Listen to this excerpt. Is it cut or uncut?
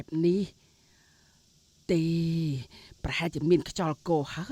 uncut